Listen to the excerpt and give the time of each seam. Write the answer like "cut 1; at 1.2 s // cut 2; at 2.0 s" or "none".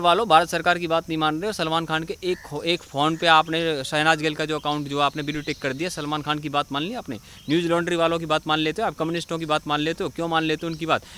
none